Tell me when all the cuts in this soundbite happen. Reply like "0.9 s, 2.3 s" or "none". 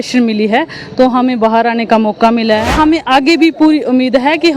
2.7 s